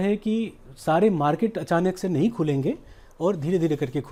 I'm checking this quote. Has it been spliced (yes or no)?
no